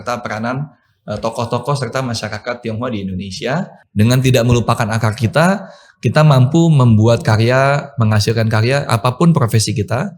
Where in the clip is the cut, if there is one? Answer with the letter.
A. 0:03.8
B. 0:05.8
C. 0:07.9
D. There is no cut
A